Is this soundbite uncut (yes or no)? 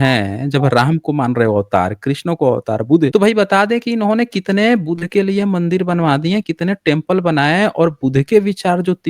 no